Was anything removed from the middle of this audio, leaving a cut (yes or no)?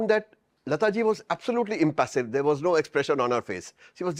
no